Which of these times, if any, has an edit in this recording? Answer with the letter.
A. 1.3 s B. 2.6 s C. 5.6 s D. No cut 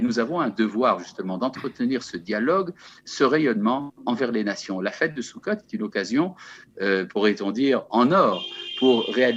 D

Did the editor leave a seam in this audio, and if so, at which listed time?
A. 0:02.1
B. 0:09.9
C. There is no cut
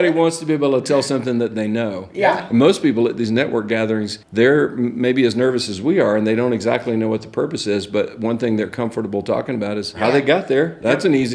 B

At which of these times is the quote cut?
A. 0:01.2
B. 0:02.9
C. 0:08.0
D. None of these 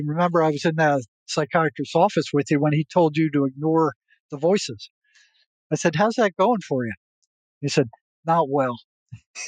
A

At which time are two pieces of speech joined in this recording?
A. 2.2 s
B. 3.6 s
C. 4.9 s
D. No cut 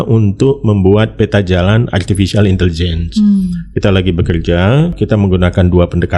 C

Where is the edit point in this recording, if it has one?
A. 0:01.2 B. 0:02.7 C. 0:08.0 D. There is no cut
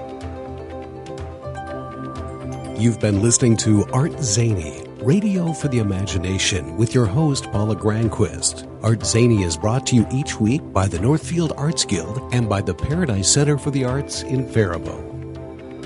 B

